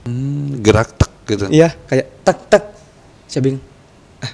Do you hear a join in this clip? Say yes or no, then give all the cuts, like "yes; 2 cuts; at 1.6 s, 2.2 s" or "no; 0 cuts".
no; 0 cuts